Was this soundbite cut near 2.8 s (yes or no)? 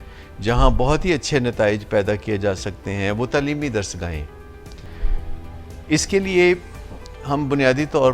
no